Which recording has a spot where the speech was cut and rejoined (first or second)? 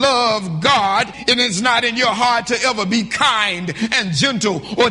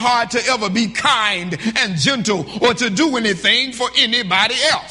first